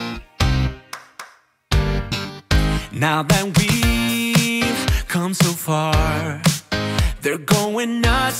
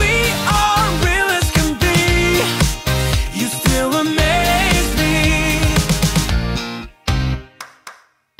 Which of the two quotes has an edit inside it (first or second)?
second